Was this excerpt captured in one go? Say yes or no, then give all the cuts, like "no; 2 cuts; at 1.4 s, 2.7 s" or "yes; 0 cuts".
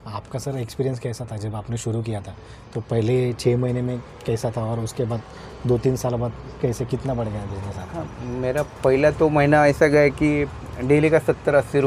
yes; 0 cuts